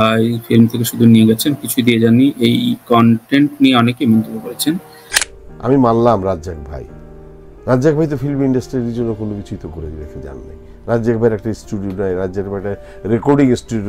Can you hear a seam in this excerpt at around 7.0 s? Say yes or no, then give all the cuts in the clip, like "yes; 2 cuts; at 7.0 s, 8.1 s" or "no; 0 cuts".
no; 0 cuts